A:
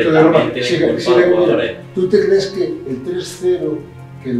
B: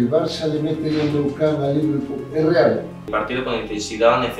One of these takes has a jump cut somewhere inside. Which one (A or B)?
B